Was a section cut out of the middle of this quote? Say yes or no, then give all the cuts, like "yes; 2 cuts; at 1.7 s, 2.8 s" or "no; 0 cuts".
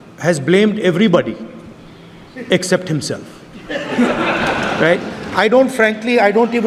no; 0 cuts